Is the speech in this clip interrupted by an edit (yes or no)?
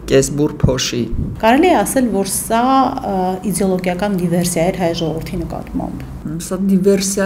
yes